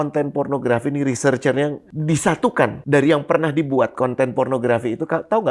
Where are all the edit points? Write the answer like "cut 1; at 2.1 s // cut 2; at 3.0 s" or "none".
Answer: cut 1; at 1.9 s // cut 2; at 2.8 s